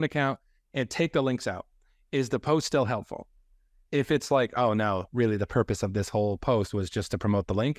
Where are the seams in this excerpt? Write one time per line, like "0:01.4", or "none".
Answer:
none